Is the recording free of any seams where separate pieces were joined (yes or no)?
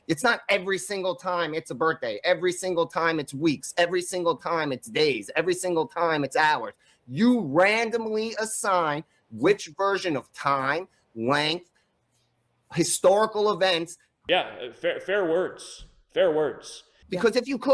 yes